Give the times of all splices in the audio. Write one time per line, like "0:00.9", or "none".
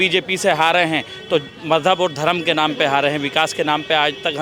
none